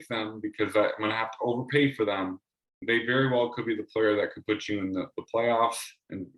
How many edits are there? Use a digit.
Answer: 1